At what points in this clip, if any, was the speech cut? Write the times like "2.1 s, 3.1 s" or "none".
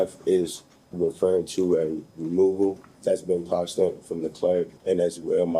2.9 s, 4.8 s